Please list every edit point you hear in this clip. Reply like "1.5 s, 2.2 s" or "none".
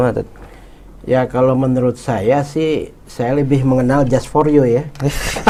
none